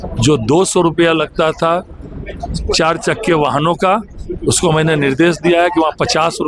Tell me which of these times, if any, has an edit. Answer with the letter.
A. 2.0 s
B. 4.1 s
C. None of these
C